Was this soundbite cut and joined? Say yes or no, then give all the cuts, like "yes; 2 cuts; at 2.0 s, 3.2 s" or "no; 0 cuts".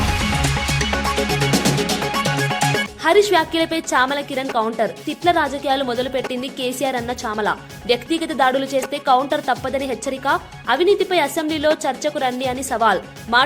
no; 0 cuts